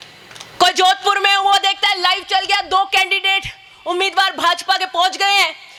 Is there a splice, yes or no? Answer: no